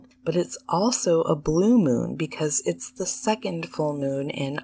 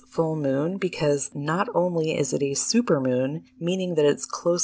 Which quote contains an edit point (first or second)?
second